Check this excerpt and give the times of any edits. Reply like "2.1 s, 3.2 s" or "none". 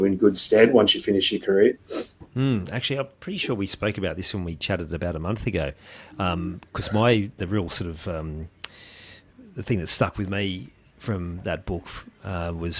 none